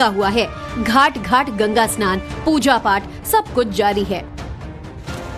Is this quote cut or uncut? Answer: uncut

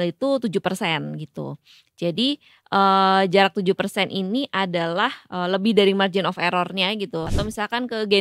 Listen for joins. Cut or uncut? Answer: cut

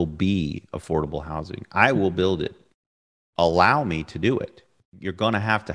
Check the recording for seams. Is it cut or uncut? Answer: cut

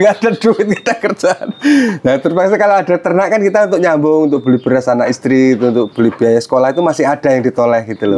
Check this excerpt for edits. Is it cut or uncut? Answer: uncut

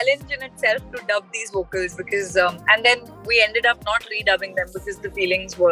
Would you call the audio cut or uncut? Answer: uncut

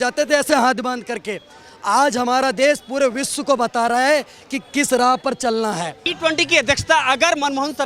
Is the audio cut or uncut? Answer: cut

